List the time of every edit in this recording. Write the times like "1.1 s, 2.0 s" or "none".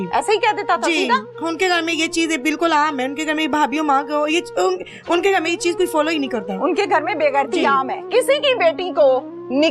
8.1 s